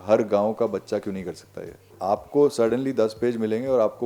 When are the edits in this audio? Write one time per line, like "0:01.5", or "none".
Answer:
0:02.0